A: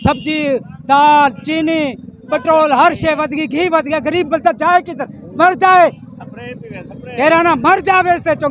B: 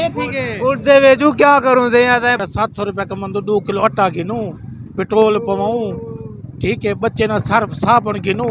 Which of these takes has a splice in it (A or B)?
B